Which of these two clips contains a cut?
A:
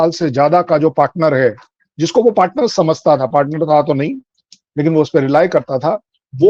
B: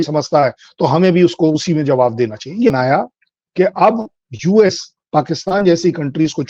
B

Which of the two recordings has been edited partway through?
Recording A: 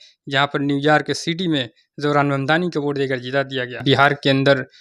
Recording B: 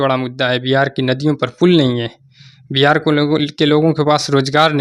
A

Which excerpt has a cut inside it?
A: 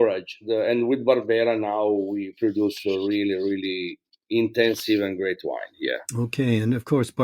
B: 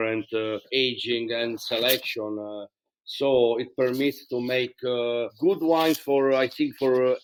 A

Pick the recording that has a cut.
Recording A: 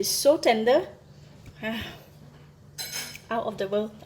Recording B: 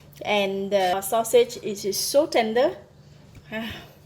B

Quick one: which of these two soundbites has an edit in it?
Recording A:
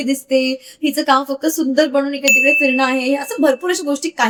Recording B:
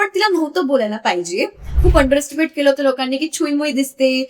B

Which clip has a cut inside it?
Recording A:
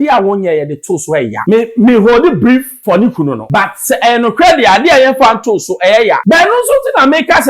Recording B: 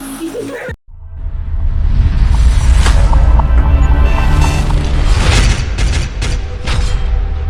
A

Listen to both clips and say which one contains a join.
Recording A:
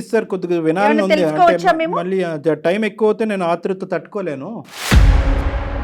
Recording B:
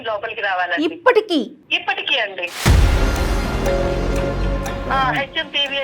B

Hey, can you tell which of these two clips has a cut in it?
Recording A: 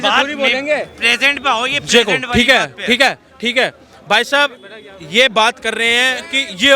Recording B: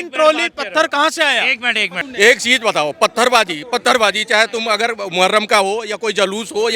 B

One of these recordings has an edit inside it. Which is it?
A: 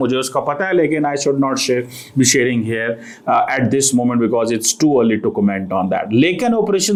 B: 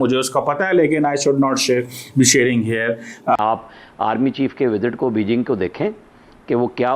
B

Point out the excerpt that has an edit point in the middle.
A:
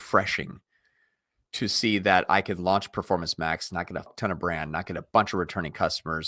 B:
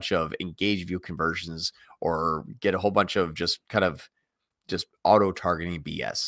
A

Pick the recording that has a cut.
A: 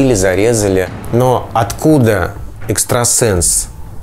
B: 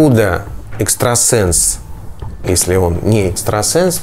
A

